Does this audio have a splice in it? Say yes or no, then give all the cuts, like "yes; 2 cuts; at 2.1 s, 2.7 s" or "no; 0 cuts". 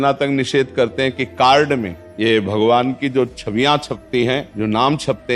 yes; 2 cuts; at 2.0 s, 4.5 s